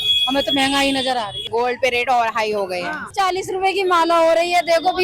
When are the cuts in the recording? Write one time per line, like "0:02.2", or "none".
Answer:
0:01.4
0:03.1